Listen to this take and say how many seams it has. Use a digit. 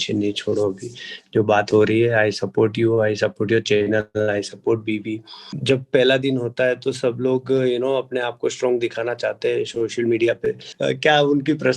2